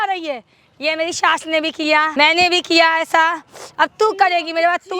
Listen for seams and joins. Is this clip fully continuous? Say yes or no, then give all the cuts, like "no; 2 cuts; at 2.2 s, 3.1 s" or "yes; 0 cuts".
no; 1 cut; at 2.1 s